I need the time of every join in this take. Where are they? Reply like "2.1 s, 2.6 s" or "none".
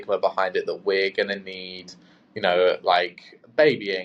none